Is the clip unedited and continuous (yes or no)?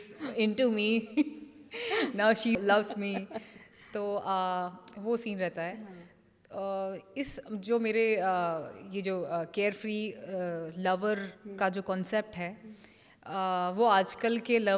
yes